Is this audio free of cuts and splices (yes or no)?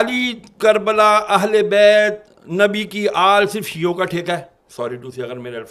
yes